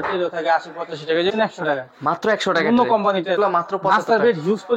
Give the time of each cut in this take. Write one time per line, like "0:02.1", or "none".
0:01.3
0:03.4